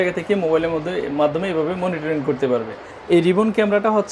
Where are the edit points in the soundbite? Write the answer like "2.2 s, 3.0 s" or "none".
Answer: 2.8 s

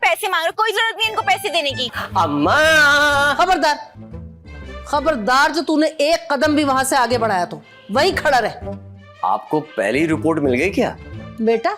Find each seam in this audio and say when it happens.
1.9 s

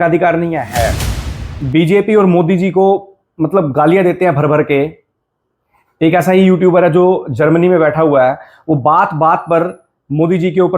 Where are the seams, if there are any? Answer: 1.2 s

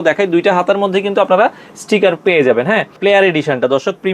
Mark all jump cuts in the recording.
3.0 s

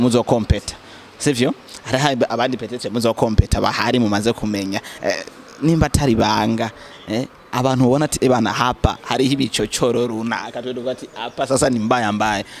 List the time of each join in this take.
none

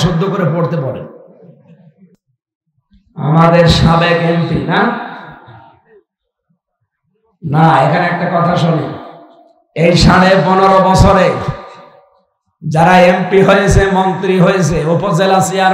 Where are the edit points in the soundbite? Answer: 2.1 s

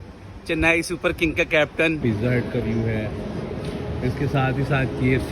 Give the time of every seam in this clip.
2.0 s

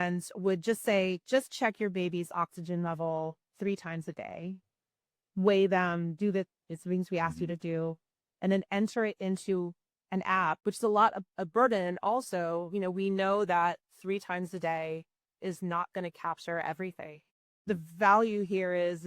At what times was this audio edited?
10.6 s, 17.7 s

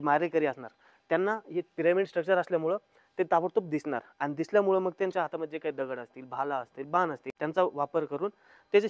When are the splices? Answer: none

